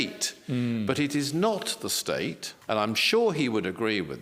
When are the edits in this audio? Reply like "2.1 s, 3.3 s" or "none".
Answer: 2.5 s